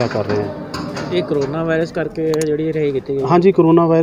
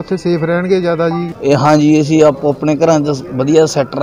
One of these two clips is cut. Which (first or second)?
second